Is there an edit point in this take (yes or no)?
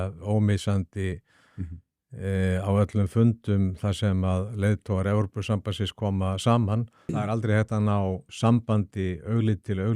yes